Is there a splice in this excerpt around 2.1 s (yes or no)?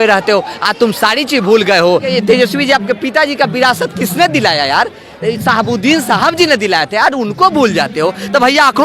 yes